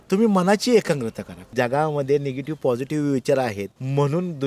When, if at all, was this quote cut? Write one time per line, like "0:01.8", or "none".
0:01.5